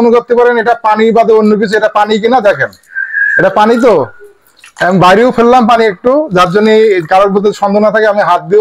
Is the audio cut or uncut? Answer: uncut